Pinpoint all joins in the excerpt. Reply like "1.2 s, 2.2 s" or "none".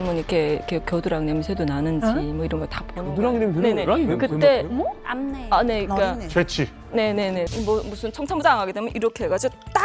7.5 s